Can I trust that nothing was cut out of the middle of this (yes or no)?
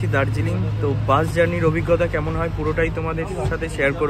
yes